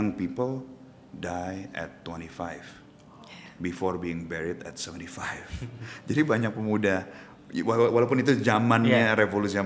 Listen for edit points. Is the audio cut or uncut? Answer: uncut